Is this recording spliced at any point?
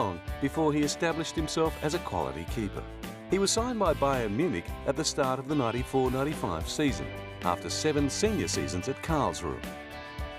yes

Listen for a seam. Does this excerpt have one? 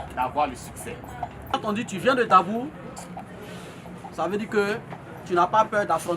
yes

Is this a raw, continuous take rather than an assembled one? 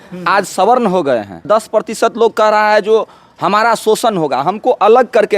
no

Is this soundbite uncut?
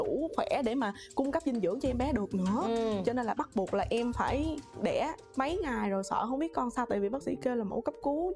no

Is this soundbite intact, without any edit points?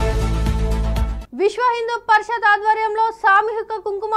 no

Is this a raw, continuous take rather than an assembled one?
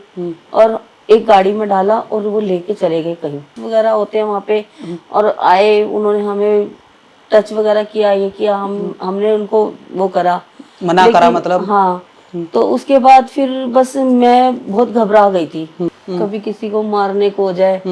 no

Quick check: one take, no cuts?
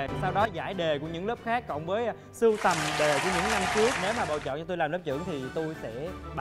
no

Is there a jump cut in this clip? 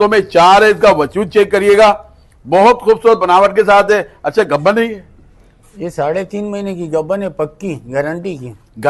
no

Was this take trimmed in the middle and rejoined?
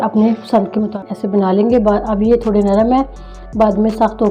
yes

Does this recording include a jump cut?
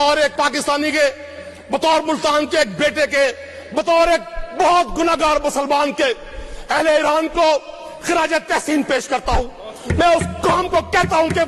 no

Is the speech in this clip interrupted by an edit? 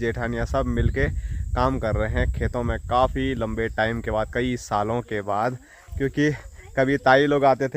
no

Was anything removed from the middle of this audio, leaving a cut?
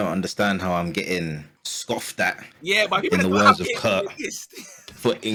no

